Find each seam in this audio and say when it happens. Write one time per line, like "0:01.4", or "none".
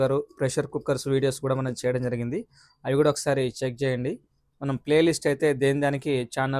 none